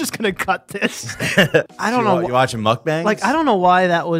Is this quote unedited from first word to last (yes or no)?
no